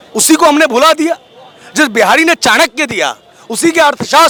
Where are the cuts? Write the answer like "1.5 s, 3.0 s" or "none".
none